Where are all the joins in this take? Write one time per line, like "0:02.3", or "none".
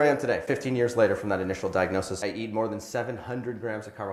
0:02.2